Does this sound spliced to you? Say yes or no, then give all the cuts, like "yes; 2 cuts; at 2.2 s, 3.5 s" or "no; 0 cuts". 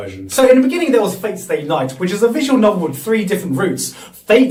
no; 0 cuts